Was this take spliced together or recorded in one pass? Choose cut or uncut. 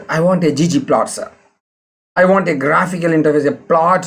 uncut